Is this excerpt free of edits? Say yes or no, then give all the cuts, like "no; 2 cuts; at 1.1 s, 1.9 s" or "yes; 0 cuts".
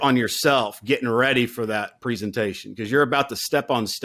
yes; 0 cuts